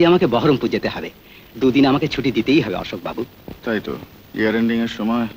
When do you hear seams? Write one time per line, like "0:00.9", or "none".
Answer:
none